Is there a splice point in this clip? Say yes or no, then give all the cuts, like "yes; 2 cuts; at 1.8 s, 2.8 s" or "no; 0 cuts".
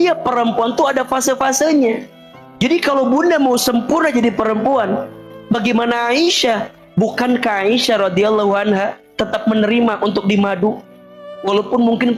yes; 2 cuts; at 5.2 s, 6.7 s